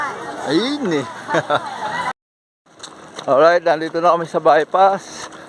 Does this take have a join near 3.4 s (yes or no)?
no